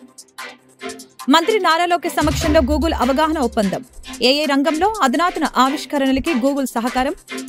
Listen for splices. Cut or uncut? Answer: cut